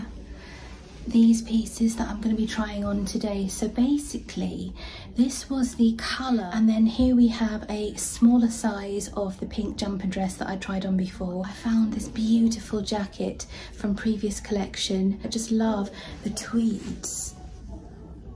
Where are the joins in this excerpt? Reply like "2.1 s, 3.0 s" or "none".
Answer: 6.5 s, 11.5 s, 15.2 s